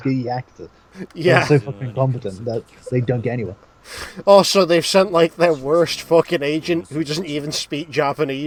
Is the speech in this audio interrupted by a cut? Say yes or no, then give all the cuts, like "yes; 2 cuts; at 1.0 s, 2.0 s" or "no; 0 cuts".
no; 0 cuts